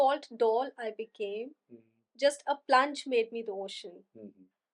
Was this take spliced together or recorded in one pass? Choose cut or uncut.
uncut